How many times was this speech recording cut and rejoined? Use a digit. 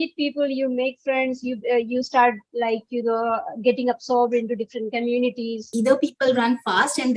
1